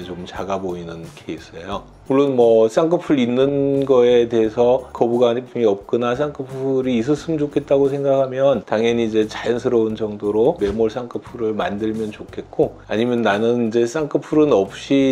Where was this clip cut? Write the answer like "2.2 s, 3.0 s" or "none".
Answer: none